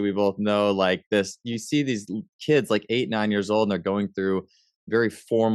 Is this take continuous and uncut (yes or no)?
yes